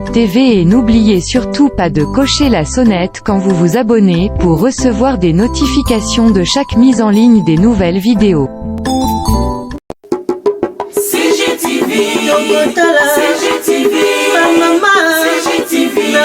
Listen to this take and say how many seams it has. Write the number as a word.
zero